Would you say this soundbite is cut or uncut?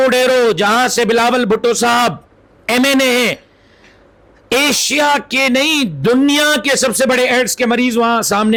uncut